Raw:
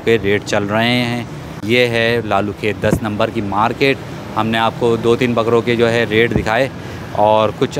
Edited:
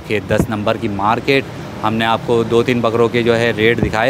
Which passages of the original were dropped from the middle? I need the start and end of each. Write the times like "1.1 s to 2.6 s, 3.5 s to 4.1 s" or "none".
none